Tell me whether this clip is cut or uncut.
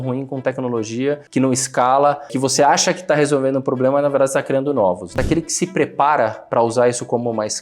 cut